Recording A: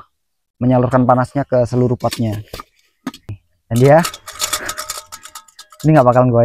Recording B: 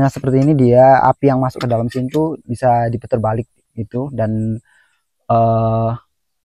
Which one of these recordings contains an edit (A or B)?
A